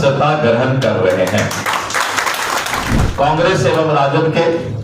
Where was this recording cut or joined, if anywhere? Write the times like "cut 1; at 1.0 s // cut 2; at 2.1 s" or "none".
cut 1; at 3.0 s